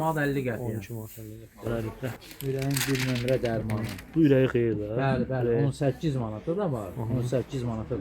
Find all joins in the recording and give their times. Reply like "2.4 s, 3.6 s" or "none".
1.7 s